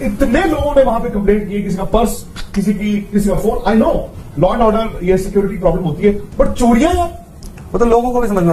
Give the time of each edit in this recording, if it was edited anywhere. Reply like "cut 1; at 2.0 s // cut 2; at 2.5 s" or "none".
none